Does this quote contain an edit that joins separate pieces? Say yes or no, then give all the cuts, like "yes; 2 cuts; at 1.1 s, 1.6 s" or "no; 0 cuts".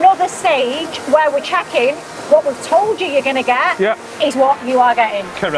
no; 0 cuts